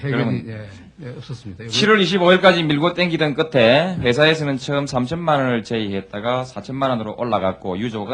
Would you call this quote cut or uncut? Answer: cut